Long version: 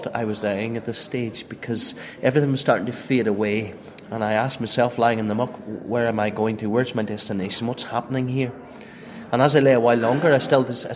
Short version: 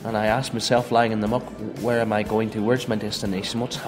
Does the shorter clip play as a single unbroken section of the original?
yes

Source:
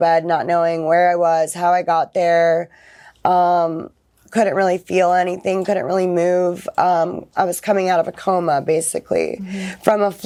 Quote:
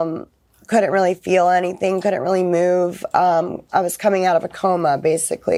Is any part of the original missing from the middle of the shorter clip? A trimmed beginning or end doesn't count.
no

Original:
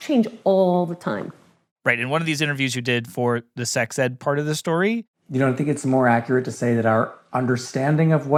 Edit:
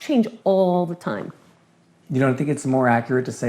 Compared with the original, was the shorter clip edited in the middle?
yes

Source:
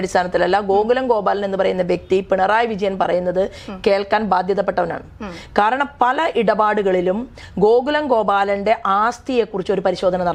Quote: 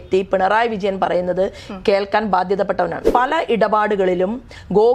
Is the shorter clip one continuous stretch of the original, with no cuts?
no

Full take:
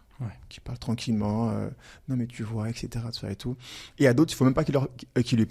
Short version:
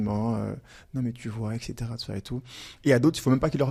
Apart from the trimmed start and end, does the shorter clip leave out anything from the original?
no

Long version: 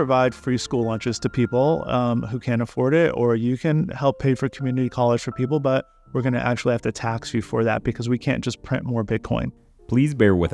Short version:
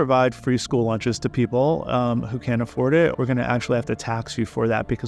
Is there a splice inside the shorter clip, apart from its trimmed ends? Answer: yes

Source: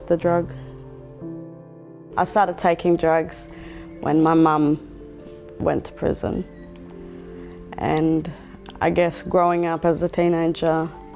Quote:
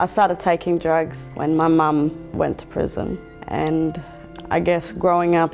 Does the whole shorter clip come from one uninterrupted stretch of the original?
no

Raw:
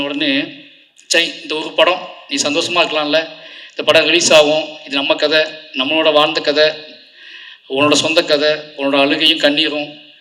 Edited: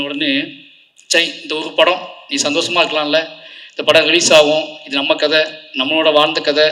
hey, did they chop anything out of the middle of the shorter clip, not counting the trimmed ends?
no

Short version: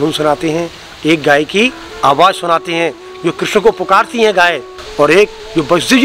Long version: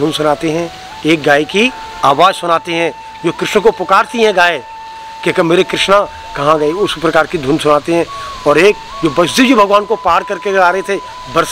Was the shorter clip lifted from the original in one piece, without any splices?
no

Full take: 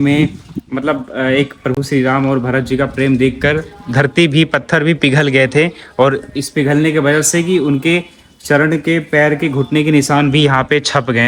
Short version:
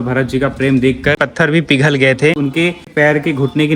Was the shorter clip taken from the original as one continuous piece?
no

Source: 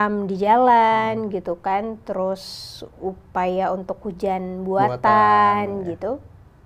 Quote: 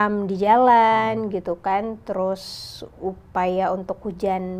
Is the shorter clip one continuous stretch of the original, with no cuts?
yes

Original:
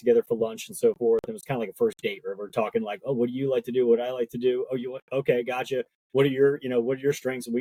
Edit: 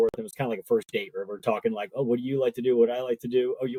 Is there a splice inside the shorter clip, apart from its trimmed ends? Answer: no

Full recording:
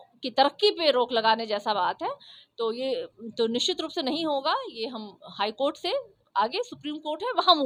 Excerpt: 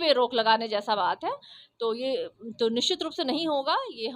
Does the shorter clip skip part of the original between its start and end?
no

